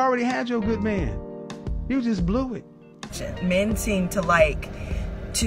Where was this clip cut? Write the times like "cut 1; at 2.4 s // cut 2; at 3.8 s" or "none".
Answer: cut 1; at 3.2 s